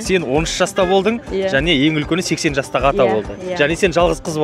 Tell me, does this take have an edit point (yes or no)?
no